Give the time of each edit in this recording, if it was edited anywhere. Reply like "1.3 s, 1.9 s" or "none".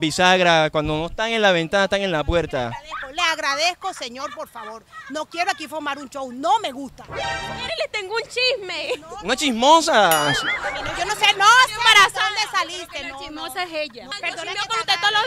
none